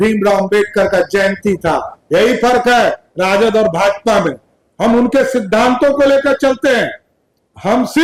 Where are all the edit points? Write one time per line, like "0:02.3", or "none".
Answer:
none

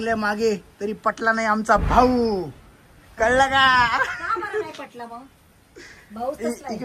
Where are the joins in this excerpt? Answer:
none

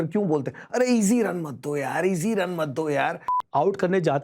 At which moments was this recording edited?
0:03.3

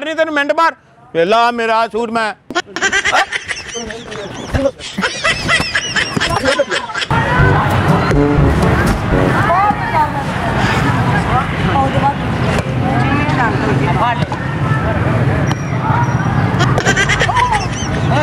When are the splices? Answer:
none

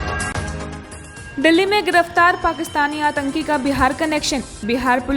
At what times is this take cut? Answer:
0:01.1

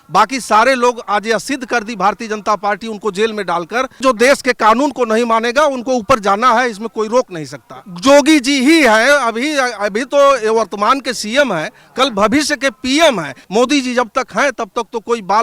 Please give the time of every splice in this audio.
0:04.0
0:07.8
0:13.4

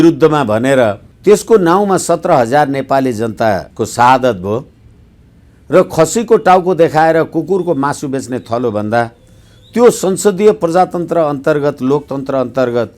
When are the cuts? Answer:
0:01.1
0:03.7

